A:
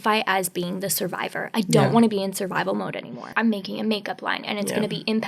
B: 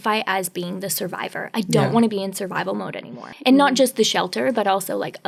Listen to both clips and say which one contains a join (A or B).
A